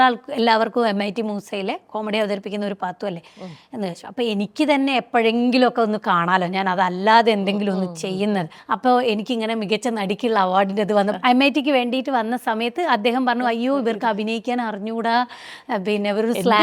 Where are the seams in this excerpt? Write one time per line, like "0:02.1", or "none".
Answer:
0:08.6
0:11.2